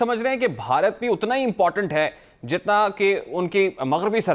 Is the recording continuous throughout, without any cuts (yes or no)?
yes